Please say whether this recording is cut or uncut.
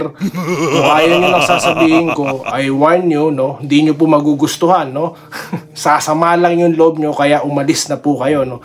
uncut